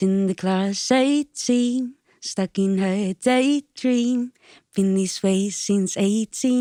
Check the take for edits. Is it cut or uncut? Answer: uncut